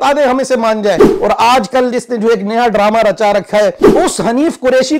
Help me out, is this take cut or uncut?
cut